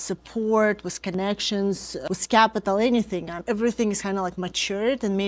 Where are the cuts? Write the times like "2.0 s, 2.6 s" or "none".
1.9 s, 3.4 s